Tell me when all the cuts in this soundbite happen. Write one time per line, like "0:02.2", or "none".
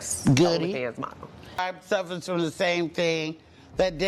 0:01.6